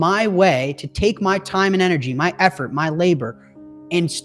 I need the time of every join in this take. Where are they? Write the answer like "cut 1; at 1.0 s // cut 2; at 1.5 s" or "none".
none